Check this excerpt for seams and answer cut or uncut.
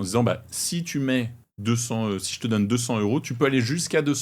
cut